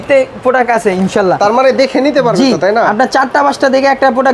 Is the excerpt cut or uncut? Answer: uncut